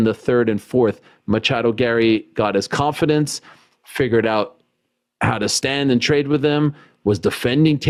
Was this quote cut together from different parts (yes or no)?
no